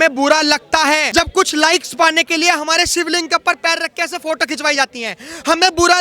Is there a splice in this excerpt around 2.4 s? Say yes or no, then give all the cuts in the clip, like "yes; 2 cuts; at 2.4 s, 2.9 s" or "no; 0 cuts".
no; 1 cut; at 1.1 s